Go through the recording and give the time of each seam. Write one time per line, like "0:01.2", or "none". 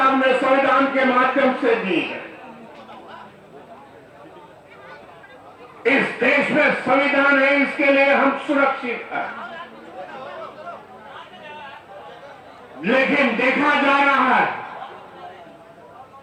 none